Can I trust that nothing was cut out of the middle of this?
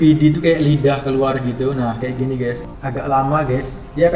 no; 1 cut; at 2.7 s

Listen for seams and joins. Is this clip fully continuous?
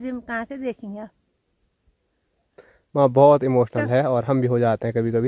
yes; 0 cuts

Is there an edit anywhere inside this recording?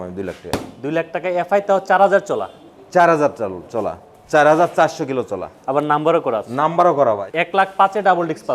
yes; 1 cut; at 7.3 s

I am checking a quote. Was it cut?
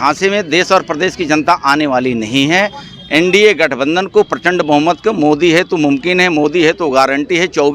no; 0 cuts

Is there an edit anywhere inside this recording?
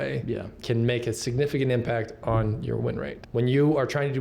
yes; 1 cut; at 3.1 s

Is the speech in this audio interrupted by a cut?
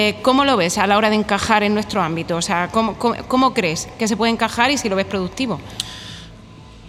no; 0 cuts

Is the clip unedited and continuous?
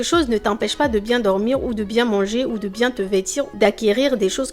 yes; 0 cuts

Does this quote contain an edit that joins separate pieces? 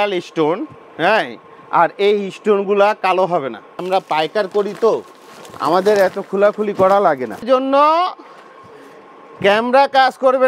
yes; 2 cuts; at 3.8 s, 7.4 s

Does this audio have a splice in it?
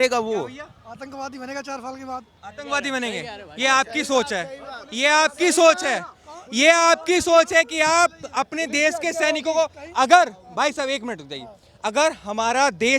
no; 0 cuts

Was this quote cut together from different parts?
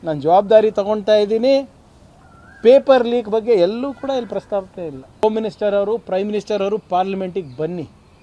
yes; 1 cut; at 5.2 s

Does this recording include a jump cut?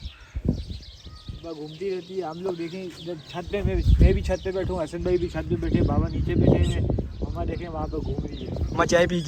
no; 0 cuts

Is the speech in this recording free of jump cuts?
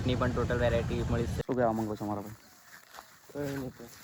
no; 1 cut; at 1.4 s

